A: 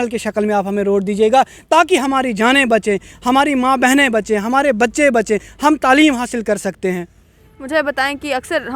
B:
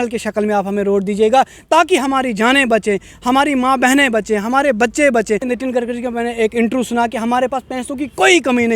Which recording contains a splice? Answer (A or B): B